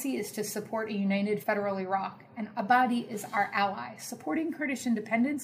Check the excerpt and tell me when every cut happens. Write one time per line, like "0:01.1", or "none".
0:01.4